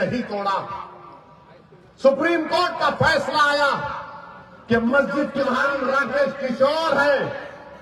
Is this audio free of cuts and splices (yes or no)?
no